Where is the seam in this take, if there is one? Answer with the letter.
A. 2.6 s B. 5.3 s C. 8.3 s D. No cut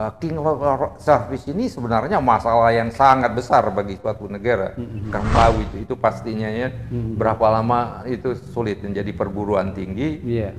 B